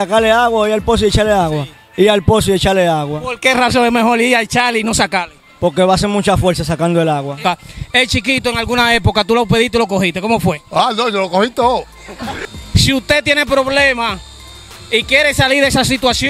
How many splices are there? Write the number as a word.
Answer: two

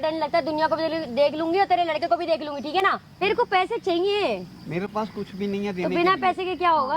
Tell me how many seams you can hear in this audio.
one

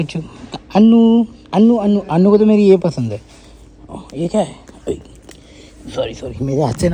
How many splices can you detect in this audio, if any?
zero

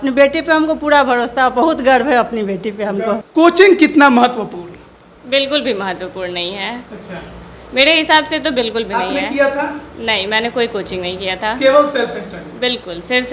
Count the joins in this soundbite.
one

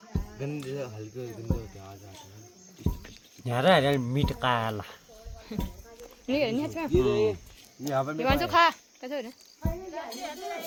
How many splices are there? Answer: zero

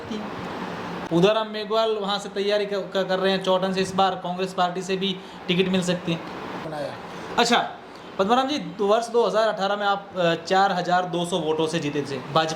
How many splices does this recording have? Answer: two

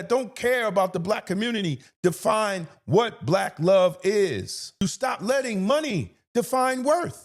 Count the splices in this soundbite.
one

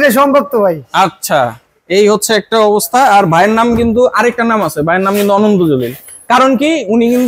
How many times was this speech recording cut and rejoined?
zero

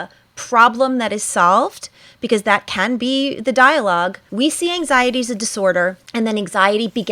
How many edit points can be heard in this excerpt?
two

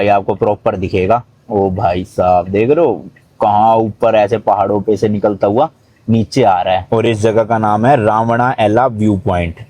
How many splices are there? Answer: one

